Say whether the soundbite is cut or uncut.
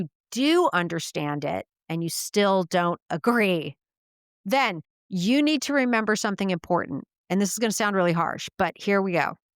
cut